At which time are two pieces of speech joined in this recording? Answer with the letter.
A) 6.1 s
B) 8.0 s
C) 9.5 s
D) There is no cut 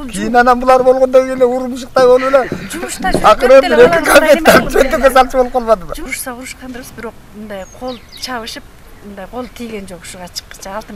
A